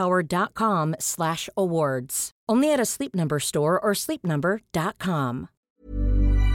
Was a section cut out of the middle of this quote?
yes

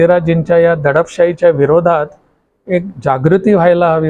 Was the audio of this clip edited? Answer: no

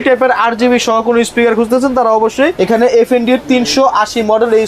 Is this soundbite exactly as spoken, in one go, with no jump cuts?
no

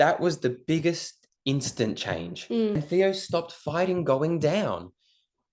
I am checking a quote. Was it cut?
yes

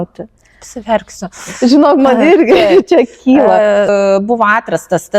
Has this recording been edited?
yes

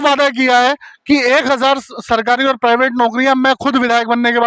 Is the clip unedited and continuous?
yes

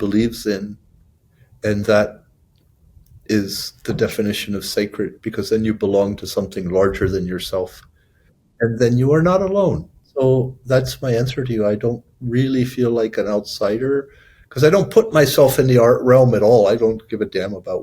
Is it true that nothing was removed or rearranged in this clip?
no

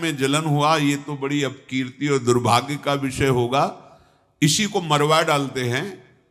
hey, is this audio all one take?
yes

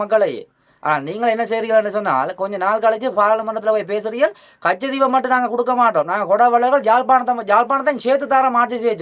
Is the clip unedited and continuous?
yes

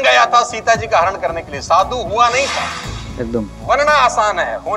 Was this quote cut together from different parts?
no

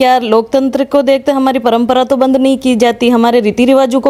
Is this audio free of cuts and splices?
yes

